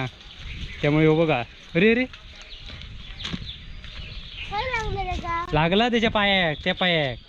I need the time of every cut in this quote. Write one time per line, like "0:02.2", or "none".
none